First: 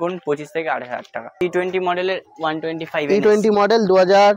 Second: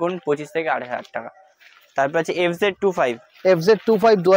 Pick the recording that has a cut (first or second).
first